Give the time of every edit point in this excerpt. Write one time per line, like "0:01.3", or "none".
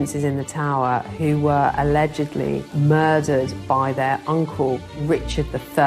0:04.9